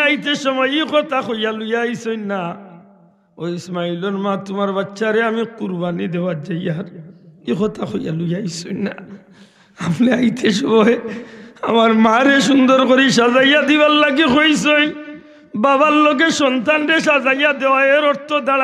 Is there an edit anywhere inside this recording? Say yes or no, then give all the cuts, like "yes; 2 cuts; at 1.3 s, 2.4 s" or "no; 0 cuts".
no; 0 cuts